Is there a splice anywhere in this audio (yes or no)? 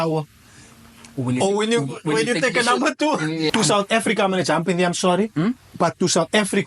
yes